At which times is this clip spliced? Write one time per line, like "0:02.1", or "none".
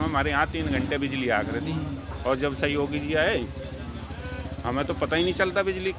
none